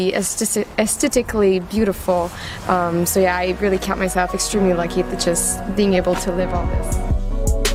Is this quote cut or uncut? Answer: uncut